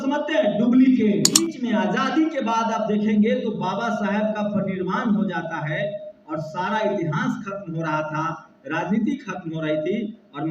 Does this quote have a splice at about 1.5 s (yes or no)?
yes